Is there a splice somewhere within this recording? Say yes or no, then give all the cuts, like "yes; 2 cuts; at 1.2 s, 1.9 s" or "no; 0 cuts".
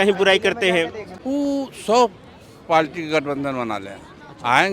yes; 1 cut; at 1.1 s